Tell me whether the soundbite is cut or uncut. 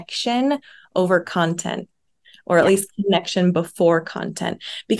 uncut